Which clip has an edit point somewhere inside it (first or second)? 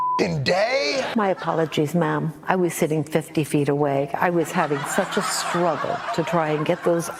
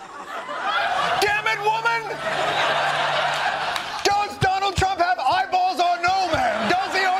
first